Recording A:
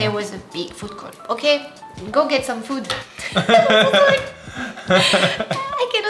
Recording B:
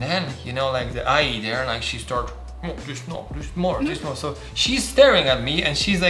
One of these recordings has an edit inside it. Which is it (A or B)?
A